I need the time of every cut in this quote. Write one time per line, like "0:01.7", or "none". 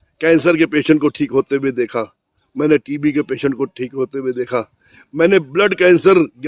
none